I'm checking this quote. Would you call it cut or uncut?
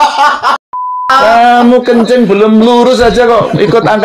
cut